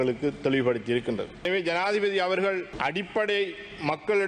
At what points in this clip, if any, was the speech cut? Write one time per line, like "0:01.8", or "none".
0:01.5
0:02.7